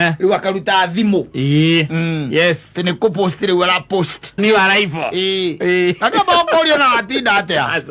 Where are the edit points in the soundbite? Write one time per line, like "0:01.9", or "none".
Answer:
0:04.4